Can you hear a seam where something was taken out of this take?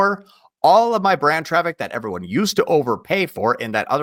no; 0 cuts

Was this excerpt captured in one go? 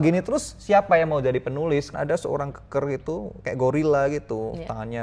no; 1 cut; at 1.9 s

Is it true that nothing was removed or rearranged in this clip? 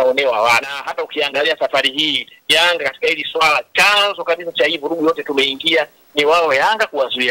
no; 1 cut; at 1.0 s

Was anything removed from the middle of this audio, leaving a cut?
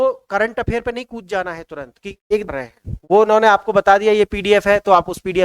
yes; 1 cut; at 2.5 s

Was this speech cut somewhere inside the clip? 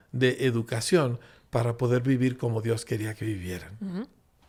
no; 0 cuts

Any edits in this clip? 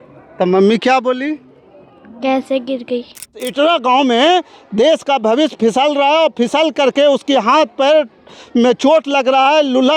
yes; 1 cut; at 3.4 s

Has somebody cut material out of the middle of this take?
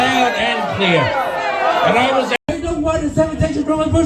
yes; 1 cut; at 2.4 s

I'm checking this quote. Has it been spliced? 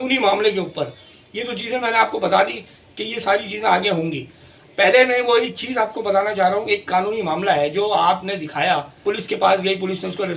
no; 0 cuts

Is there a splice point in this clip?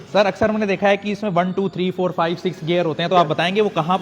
no; 0 cuts

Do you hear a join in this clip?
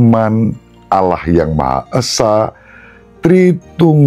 no; 0 cuts

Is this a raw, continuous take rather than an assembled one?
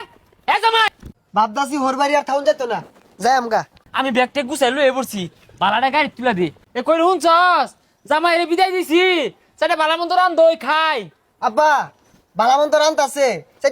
no; 3 cuts; at 0.9 s, 3.8 s, 6.6 s

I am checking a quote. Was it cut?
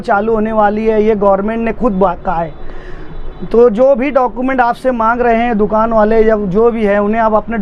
no; 0 cuts

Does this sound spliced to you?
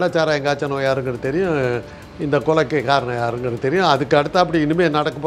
no; 0 cuts

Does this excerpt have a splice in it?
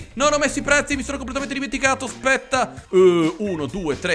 yes; 1 cut; at 2.8 s

